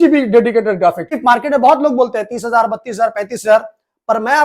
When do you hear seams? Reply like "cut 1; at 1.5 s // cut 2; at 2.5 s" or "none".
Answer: cut 1; at 1.2 s